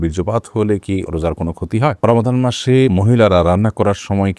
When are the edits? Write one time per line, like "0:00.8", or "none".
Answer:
0:02.0
0:02.9